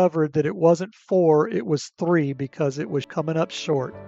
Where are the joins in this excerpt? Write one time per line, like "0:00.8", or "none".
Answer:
0:03.1